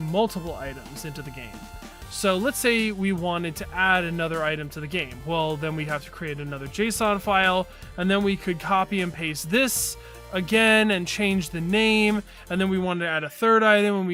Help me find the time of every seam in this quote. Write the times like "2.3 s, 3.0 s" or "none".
none